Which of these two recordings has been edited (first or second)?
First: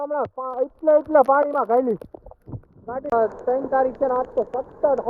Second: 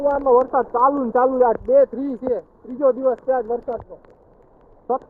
first